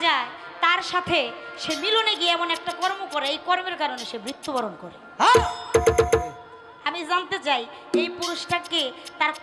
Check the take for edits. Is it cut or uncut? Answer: uncut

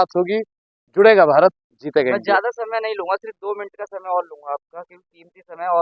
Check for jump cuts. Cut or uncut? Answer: uncut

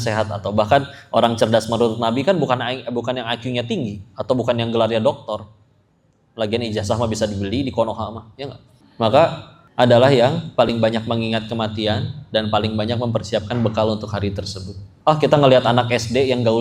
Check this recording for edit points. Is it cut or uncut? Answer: uncut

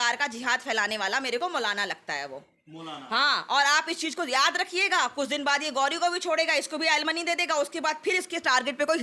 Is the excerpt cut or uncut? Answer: uncut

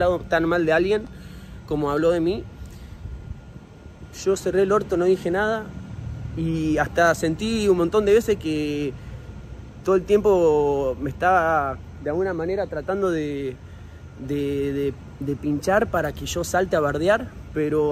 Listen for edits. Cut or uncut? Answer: uncut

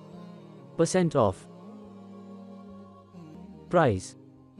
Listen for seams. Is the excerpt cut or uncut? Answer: cut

